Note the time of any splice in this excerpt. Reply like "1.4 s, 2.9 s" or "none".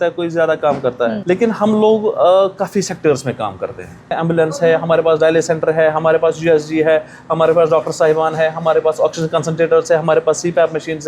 1.2 s, 4.2 s